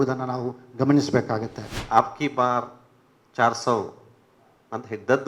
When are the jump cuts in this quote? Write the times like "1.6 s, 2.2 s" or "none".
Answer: 1.8 s